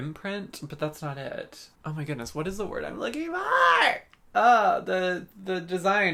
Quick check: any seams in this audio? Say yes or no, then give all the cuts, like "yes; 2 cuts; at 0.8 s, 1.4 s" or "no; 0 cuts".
no; 0 cuts